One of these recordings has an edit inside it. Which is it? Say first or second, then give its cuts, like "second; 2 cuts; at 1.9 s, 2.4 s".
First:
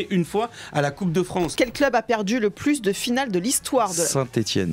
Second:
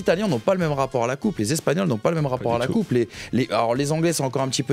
first; 1 cut; at 1.5 s